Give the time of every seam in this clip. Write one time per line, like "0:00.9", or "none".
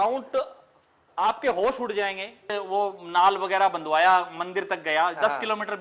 0:02.5